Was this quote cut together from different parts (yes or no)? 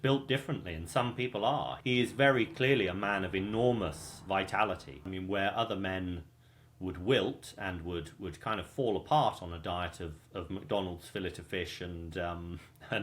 yes